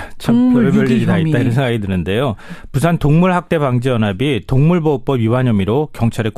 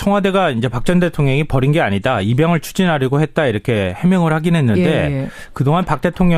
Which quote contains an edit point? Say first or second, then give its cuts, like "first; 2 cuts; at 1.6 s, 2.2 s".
first; 1 cut; at 3.2 s